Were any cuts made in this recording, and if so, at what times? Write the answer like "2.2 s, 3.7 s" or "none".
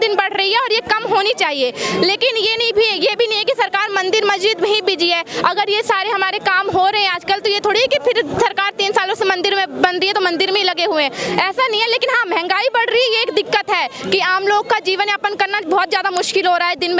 none